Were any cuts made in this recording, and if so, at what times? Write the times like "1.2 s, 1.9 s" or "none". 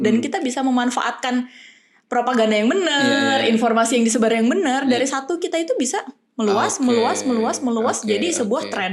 none